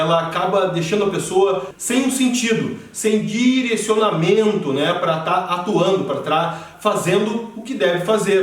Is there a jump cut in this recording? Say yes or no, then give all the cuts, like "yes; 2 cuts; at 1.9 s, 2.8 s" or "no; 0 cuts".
yes; 2 cuts; at 1.7 s, 6.7 s